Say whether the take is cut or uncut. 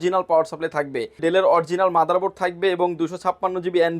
cut